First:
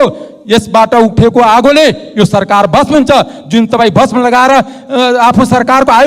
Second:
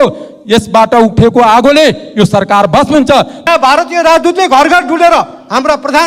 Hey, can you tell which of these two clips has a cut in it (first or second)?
second